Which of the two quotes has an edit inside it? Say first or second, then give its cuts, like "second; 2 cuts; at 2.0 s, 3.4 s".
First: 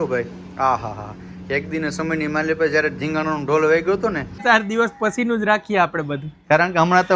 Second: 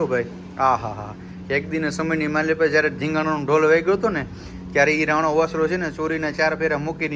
first; 1 cut; at 4.4 s